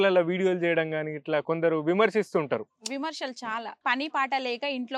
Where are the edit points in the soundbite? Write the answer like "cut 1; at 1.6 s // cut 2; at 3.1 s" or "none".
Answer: cut 1; at 3.8 s